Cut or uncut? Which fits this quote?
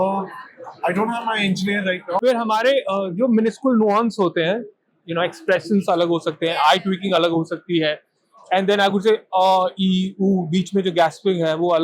cut